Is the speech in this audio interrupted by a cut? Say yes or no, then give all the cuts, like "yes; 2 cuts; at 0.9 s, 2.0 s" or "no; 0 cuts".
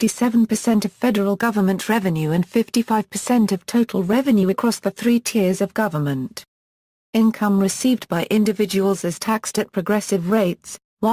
yes; 1 cut; at 5.3 s